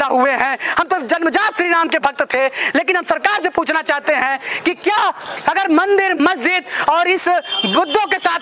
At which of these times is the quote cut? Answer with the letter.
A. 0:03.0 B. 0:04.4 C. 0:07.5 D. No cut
D